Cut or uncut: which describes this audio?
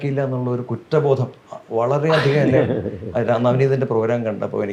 uncut